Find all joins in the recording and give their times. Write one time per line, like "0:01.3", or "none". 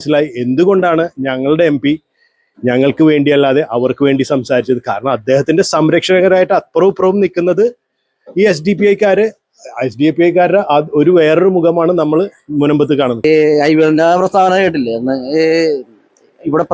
0:13.2